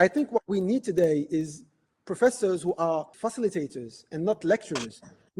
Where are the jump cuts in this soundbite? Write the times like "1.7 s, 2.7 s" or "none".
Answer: 3.1 s